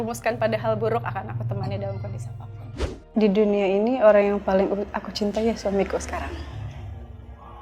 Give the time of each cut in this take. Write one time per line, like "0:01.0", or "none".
0:02.9